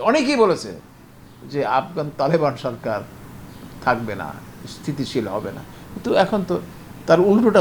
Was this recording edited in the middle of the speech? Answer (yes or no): no